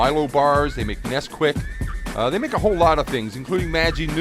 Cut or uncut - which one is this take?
uncut